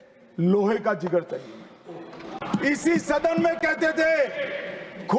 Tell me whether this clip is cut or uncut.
cut